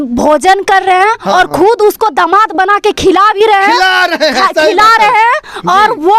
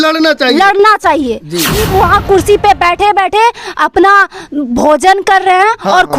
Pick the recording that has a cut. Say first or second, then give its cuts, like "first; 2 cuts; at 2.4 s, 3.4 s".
second; 1 cut; at 1.8 s